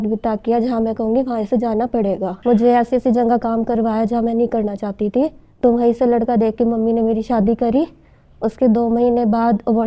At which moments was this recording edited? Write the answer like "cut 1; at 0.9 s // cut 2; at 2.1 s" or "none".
cut 1; at 2.3 s

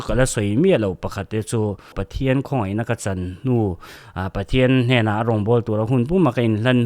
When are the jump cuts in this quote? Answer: cut 1; at 2.0 s

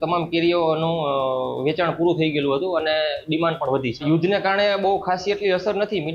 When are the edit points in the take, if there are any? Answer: cut 1; at 4.0 s

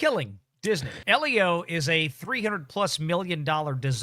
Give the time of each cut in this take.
cut 1; at 0.9 s

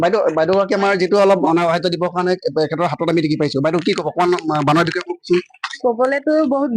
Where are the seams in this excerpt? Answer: cut 1; at 1.4 s

